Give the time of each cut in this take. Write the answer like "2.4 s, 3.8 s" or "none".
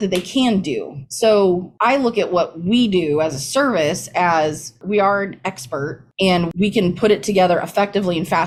none

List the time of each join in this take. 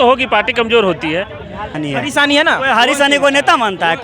1.8 s

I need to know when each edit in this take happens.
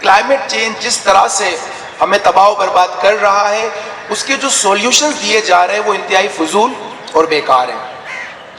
none

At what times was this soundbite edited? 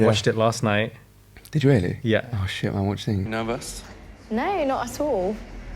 none

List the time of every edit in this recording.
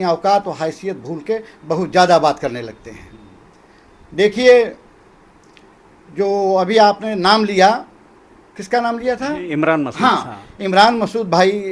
none

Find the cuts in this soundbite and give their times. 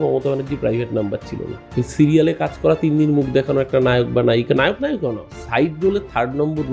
1.6 s

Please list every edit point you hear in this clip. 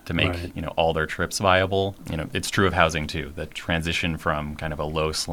2.0 s

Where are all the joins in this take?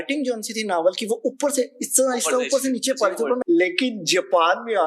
3.4 s

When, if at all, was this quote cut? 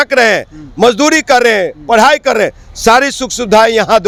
none

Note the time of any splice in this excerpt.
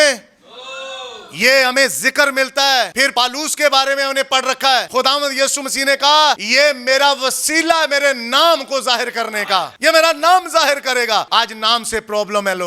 3.0 s, 4.9 s, 6.4 s, 9.7 s, 11.3 s

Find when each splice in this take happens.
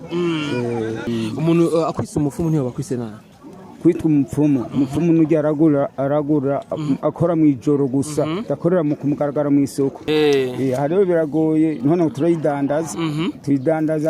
1.1 s, 10.0 s

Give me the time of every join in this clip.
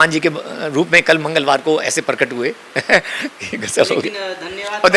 none

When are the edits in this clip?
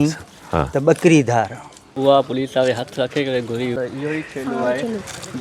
1.9 s, 3.8 s

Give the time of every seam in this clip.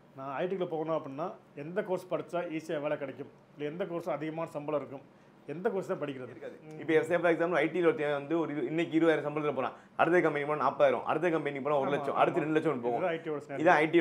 6.7 s

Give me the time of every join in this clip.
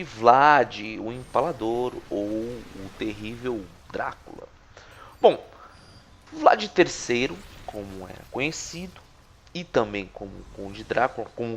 none

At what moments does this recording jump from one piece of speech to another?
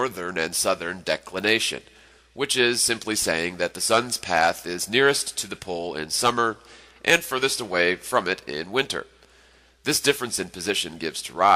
none

